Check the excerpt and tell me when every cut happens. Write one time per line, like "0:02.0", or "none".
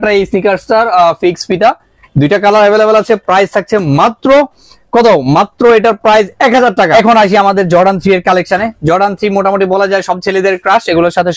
0:06.9